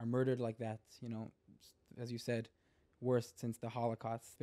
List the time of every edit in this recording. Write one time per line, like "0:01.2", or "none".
none